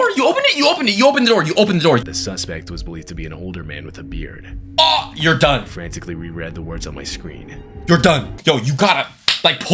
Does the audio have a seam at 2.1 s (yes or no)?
yes